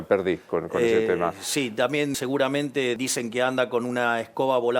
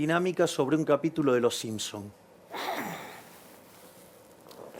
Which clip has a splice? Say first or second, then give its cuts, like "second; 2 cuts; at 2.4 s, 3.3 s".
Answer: first; 2 cuts; at 2.1 s, 3.0 s